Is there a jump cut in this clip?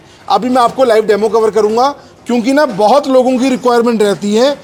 no; 0 cuts

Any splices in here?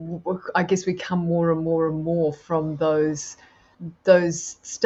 no; 0 cuts

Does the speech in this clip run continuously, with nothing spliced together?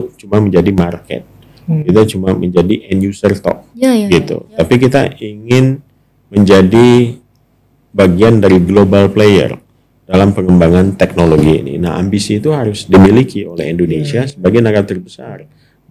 yes; 0 cuts

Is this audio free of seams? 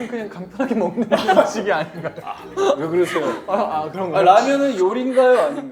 yes; 0 cuts

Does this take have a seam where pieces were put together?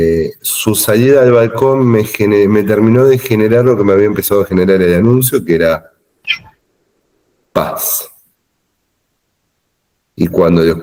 no; 0 cuts

